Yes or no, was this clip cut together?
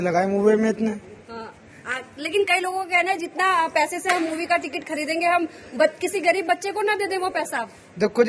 no